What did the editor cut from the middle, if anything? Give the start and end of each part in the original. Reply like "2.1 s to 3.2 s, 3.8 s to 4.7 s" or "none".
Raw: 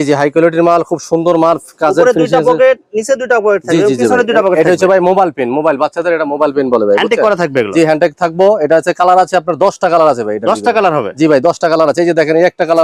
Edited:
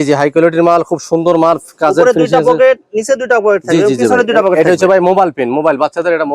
none